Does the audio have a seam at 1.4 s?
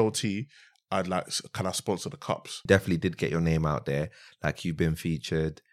no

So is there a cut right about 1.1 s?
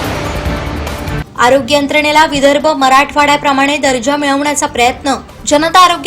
yes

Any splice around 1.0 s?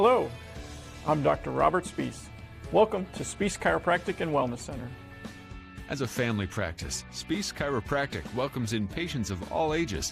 no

